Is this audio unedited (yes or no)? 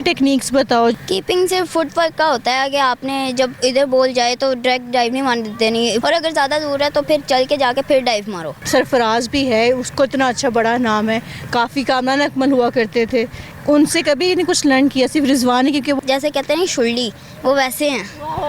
no